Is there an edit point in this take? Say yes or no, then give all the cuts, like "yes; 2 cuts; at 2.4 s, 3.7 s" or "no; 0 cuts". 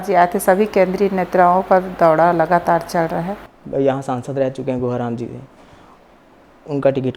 no; 0 cuts